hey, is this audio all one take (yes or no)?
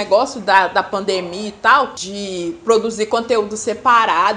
no